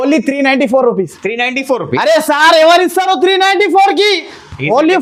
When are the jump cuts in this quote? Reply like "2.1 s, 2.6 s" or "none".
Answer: none

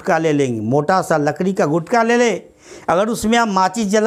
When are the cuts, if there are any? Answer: none

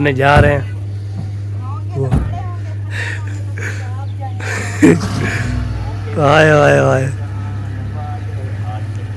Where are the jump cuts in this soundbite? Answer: none

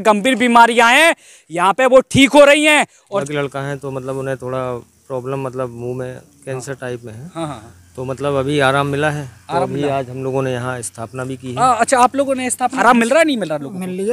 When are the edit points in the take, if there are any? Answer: 3.1 s, 12.8 s

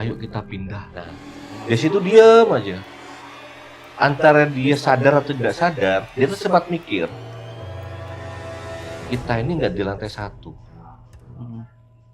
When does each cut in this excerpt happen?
1.3 s

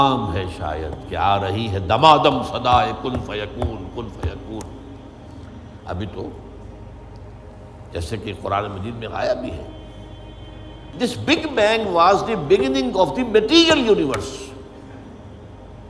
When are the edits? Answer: 10.9 s

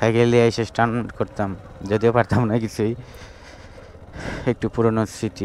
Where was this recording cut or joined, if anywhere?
none

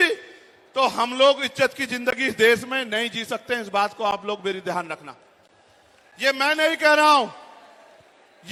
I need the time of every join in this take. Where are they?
none

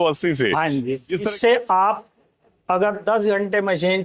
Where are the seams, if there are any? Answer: 1.3 s

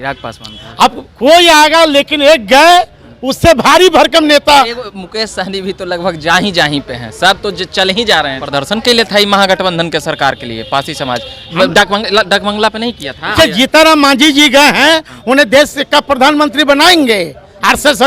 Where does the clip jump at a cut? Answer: 8.4 s, 13.3 s

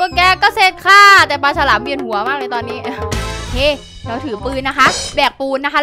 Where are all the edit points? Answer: 3.5 s

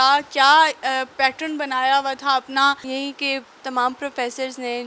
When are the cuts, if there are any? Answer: none

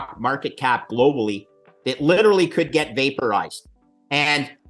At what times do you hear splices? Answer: none

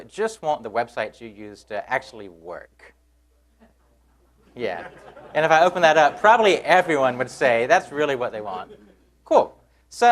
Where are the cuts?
4.5 s

